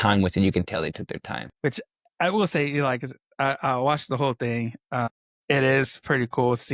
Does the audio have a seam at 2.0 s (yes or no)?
no